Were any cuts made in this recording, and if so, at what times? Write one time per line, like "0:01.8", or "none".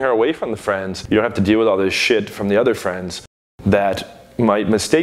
0:00.9